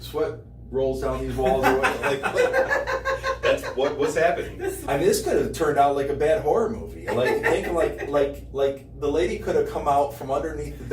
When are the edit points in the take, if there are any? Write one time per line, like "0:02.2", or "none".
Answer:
0:04.8